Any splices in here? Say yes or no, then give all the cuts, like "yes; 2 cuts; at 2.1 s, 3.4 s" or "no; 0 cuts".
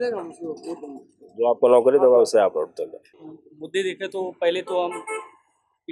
yes; 1 cut; at 3.0 s